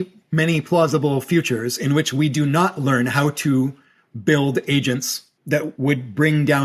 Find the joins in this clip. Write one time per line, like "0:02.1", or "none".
0:05.7